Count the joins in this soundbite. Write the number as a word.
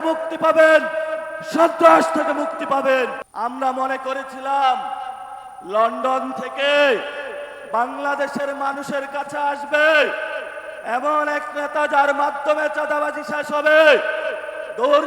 one